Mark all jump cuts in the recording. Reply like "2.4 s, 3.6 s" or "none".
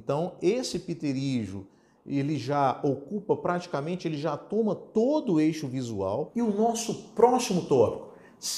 6.3 s